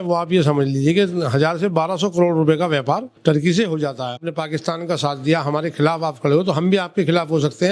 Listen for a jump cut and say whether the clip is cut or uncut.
cut